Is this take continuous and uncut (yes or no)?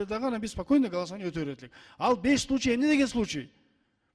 yes